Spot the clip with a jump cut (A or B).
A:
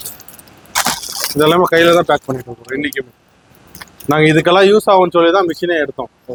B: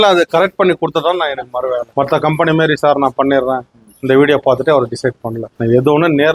B